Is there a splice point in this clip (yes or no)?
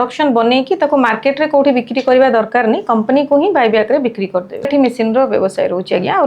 yes